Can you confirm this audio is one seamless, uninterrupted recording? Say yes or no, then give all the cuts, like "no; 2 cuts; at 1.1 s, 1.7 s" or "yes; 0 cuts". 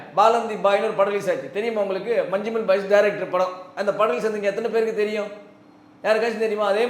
yes; 0 cuts